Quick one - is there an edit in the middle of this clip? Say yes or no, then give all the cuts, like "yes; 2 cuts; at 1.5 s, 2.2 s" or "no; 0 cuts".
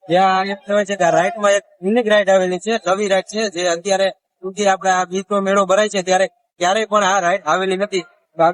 no; 0 cuts